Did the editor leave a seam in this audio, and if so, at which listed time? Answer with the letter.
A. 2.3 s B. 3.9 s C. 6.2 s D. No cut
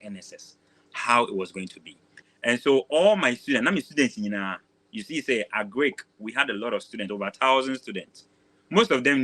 A